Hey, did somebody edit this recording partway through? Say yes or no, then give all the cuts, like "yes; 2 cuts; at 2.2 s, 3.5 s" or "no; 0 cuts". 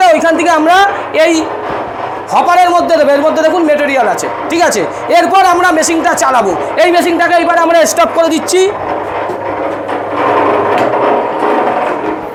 no; 0 cuts